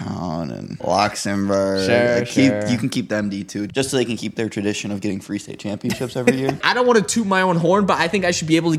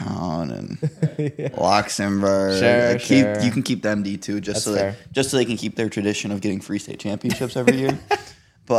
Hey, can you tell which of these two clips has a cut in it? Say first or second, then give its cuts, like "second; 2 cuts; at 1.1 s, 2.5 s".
first; 3 cuts; at 0.8 s, 3.7 s, 6.6 s